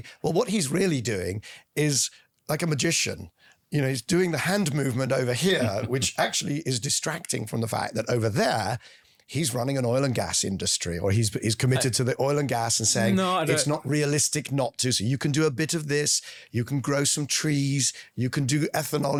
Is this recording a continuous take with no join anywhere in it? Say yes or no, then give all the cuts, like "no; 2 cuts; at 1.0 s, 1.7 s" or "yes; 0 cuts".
yes; 0 cuts